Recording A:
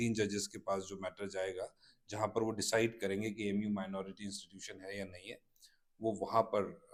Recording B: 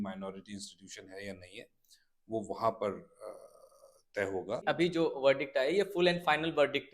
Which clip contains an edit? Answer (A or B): B